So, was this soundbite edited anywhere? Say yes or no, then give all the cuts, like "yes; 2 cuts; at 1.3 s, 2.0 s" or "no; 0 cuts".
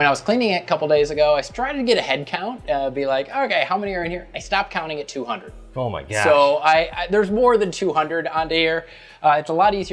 no; 0 cuts